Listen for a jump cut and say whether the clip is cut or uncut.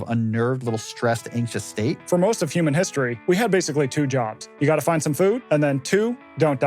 cut